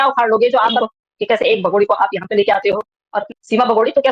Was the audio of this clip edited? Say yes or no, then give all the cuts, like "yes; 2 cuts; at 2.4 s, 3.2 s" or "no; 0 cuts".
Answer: yes; 2 cuts; at 0.8 s, 3.1 s